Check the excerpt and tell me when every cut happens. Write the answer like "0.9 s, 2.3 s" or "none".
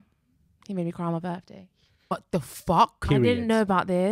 2.2 s